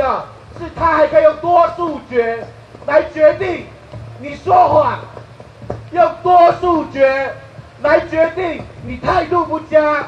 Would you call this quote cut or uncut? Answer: uncut